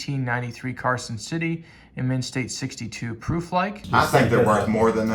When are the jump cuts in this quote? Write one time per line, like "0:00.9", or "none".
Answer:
0:03.8